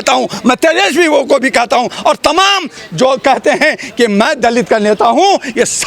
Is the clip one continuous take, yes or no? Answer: yes